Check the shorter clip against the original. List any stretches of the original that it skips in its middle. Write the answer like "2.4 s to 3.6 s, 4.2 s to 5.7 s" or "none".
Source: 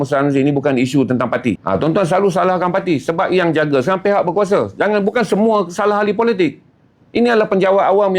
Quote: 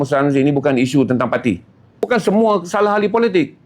1.8 s to 4.8 s